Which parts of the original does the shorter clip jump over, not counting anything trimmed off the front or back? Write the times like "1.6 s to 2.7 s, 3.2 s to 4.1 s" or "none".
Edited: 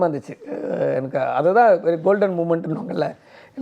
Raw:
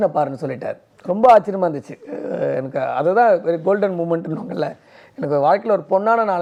none